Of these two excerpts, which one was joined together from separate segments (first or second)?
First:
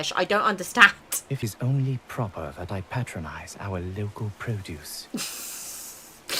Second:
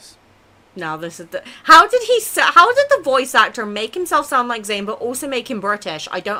first